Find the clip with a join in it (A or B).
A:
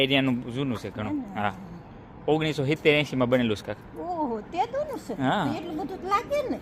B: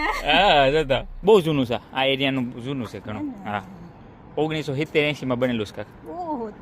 B